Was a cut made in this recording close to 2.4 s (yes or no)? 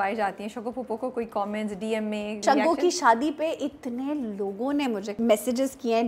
yes